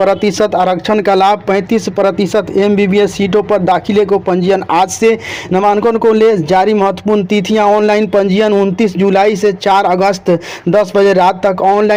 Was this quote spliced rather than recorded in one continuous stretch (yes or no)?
no